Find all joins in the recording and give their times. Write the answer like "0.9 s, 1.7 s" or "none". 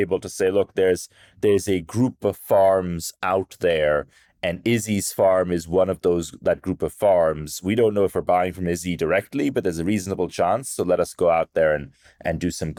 none